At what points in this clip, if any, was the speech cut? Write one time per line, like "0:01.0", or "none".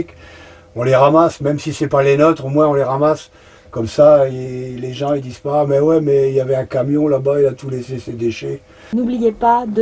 0:08.8